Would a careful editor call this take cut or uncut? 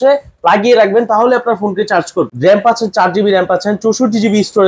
cut